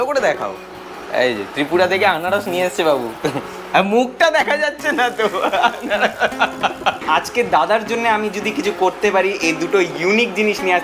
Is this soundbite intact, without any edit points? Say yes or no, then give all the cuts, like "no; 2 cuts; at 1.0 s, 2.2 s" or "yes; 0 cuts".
no; 1 cut; at 7.0 s